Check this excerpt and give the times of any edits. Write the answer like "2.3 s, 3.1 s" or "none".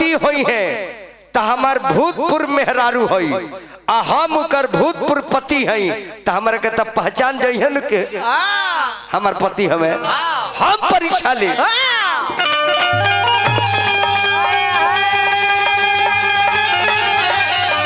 none